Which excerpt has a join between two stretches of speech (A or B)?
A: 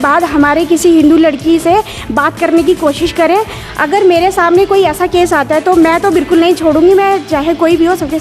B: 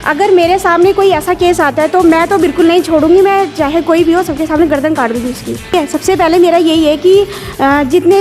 B